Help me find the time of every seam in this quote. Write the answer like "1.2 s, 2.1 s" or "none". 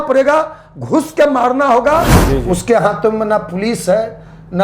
2.2 s